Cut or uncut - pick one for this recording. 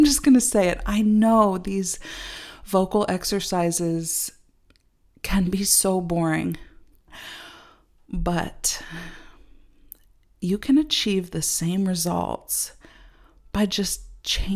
cut